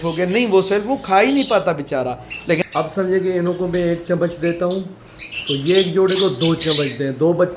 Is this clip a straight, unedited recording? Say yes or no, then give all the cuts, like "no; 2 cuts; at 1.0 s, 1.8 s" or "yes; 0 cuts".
no; 1 cut; at 2.6 s